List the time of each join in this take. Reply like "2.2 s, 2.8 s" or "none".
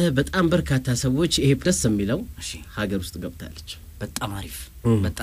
1.6 s

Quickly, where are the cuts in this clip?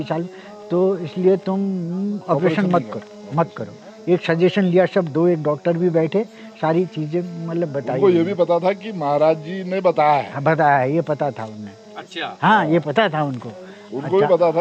none

